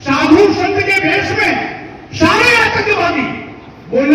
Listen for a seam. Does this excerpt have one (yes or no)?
no